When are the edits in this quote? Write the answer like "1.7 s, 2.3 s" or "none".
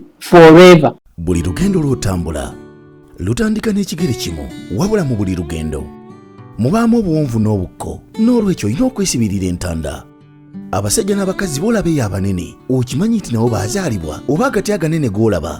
1.1 s